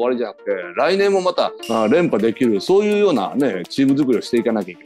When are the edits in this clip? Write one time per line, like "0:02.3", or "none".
none